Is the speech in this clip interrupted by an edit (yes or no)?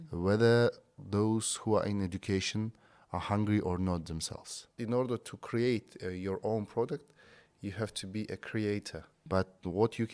yes